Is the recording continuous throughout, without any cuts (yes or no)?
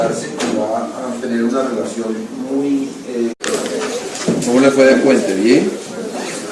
yes